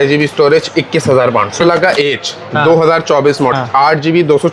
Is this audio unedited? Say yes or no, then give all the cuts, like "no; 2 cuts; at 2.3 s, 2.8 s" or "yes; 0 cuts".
no; 2 cuts; at 1.6 s, 3.6 s